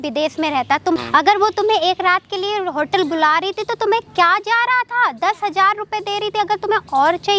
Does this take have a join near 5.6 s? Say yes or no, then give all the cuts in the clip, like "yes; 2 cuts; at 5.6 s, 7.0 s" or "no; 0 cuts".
no; 1 cut; at 1.0 s